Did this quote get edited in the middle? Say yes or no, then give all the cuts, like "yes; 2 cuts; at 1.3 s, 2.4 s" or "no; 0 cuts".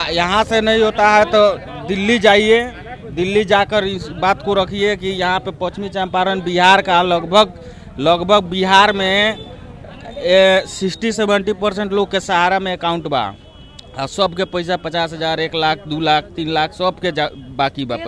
no; 0 cuts